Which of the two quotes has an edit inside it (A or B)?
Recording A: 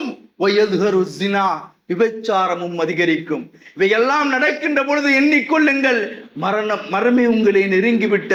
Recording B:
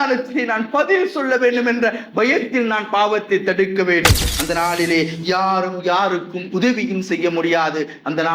B